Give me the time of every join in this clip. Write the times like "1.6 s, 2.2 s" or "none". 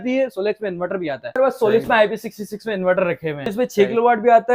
1.3 s, 3.5 s